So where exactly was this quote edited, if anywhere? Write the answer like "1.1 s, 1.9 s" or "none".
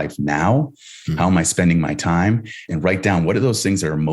2.6 s